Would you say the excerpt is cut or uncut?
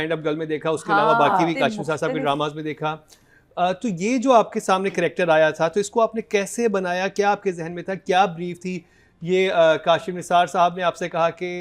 uncut